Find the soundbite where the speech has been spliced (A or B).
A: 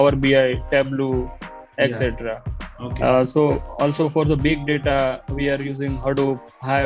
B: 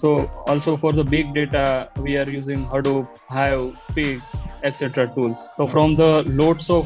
B